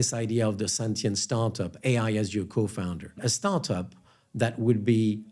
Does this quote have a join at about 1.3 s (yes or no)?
no